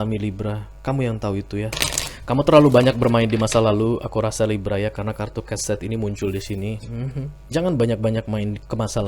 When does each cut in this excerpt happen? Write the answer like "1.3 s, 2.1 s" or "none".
1.8 s